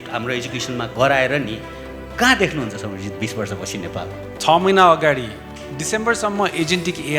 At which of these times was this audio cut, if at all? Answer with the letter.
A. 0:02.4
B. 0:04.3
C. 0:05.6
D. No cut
B